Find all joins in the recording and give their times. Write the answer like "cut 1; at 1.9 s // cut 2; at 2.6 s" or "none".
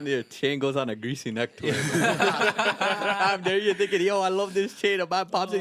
none